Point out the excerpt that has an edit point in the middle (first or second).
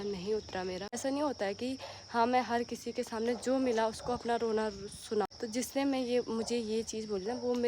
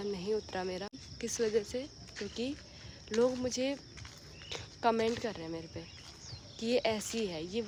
first